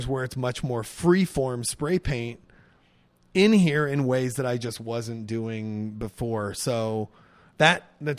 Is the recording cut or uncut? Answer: uncut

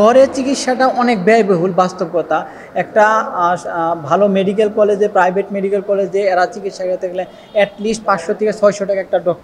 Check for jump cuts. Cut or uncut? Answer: uncut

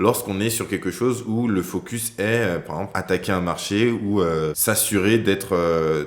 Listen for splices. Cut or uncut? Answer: cut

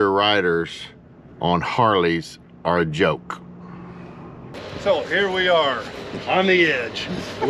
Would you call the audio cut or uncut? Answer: cut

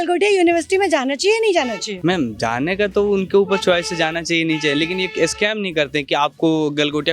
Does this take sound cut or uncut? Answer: uncut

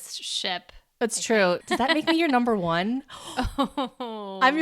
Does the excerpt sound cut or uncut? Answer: cut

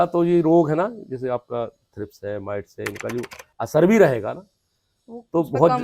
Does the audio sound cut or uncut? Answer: uncut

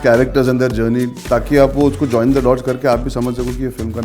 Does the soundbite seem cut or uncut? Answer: uncut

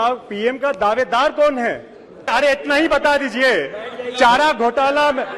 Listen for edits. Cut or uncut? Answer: cut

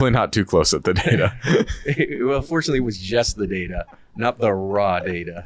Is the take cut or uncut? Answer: uncut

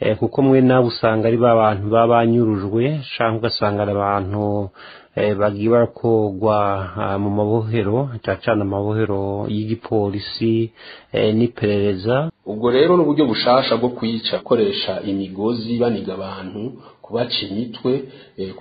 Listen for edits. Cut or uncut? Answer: cut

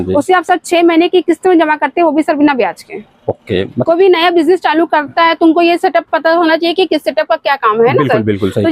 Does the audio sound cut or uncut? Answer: cut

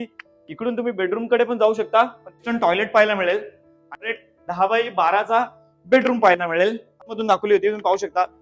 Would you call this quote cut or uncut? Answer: cut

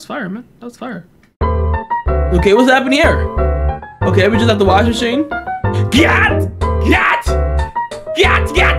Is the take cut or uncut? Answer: cut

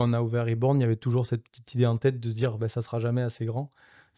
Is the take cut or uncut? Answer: uncut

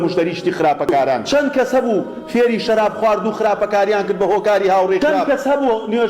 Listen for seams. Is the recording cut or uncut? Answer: cut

